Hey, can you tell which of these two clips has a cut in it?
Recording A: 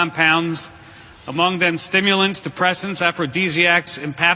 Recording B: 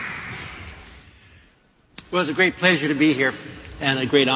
B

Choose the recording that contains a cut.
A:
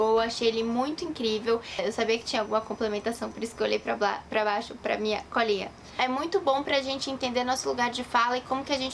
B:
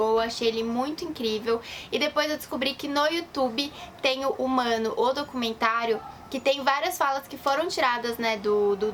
A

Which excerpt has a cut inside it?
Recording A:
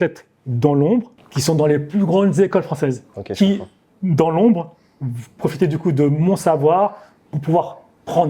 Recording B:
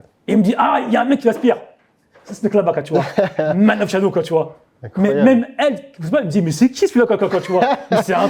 A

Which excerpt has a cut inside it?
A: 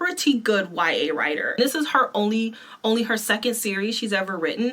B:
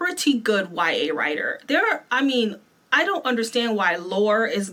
A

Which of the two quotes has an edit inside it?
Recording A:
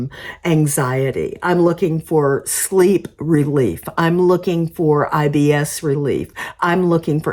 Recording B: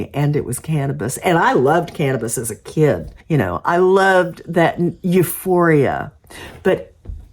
B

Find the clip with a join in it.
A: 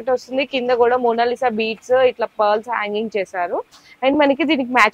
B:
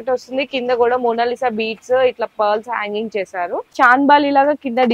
B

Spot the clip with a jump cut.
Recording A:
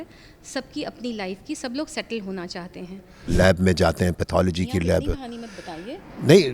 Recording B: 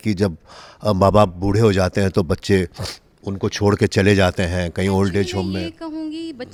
A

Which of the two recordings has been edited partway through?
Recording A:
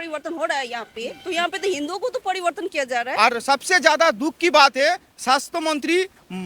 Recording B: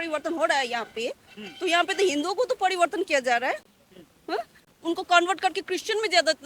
A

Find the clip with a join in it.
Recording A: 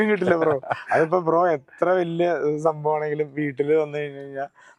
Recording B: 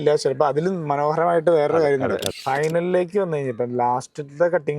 B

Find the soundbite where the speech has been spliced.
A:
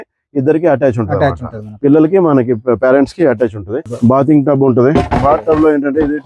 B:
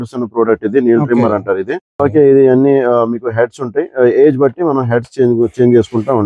A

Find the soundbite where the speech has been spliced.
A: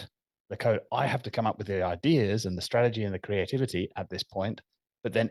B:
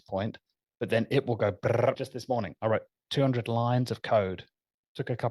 B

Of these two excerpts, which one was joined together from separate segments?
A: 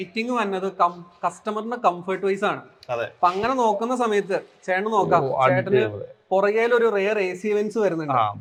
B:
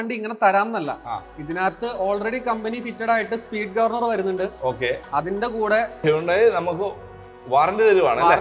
B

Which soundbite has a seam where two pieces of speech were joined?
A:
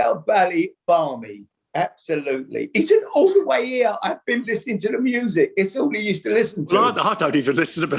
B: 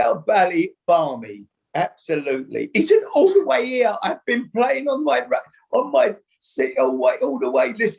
A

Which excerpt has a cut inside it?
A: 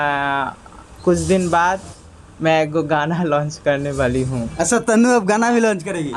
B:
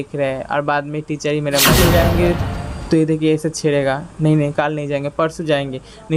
B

